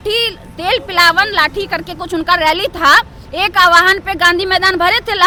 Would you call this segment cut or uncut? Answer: uncut